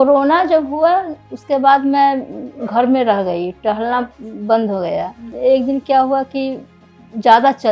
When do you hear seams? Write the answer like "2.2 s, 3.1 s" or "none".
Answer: 5.3 s